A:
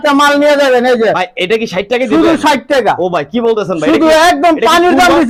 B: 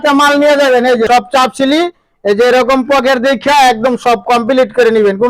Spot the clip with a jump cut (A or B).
B